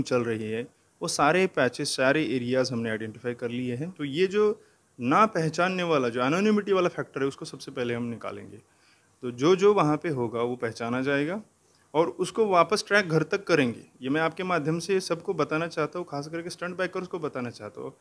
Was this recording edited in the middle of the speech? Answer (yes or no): yes